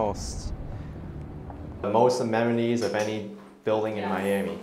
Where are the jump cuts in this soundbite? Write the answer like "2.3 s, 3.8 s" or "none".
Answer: 1.8 s

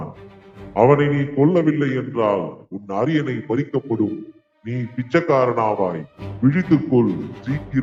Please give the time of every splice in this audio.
none

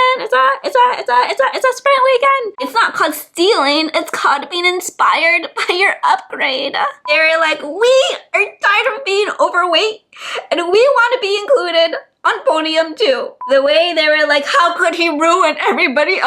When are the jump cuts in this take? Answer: 2.5 s, 7.0 s, 13.4 s

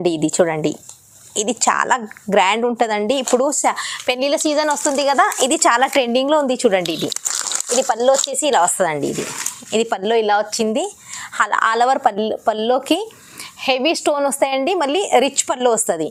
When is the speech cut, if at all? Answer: none

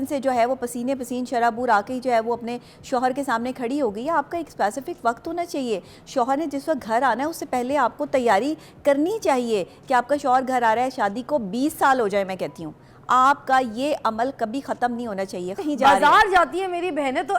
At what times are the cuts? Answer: 15.6 s

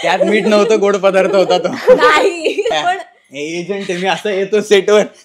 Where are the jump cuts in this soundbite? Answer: 2.7 s

